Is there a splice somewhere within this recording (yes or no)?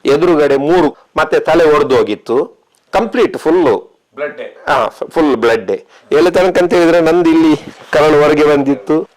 no